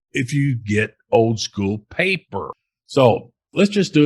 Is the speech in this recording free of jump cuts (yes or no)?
no